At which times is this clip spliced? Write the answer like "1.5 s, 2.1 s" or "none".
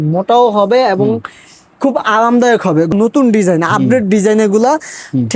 2.9 s